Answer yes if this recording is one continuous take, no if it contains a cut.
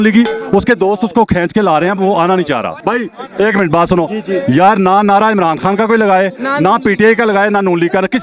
no